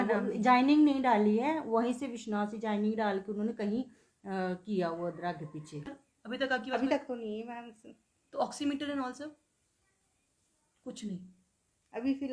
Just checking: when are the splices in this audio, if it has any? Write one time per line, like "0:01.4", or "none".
0:05.9